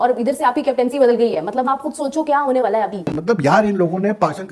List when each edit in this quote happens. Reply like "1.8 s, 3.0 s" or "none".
3.1 s